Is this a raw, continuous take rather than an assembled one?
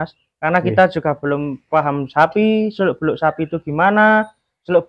yes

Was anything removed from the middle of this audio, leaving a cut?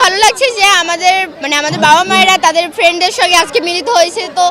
yes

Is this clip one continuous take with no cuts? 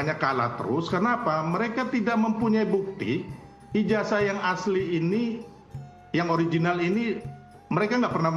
yes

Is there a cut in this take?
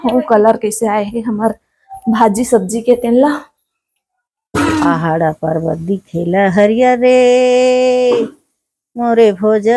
yes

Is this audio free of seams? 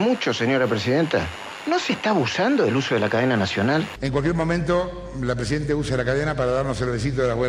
no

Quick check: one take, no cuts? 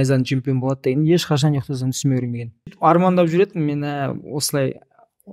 no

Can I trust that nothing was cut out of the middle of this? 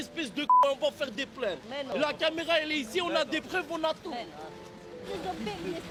yes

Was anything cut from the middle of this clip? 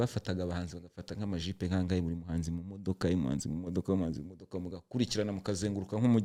no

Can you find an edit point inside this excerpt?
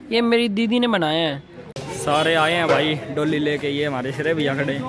yes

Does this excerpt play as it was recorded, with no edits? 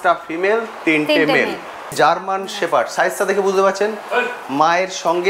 no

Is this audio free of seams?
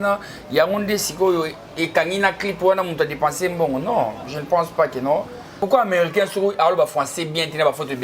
no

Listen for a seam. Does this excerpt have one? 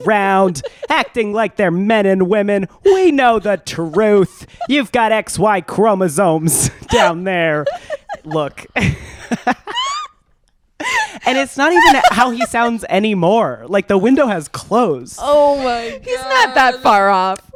no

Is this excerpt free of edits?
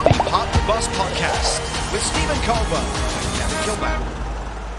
yes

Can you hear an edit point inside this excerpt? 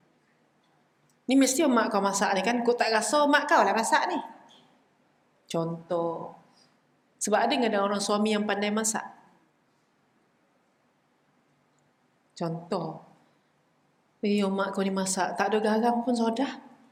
no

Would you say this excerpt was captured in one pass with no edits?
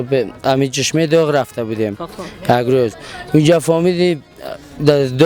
yes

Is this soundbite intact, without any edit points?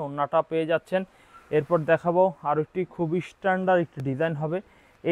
yes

